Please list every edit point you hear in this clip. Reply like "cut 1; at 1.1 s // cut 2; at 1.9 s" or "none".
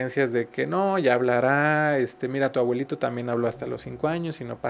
none

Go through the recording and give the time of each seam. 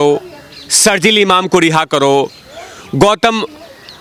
none

